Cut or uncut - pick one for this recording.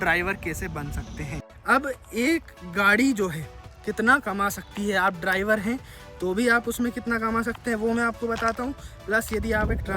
cut